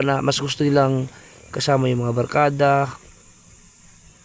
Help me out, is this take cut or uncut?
uncut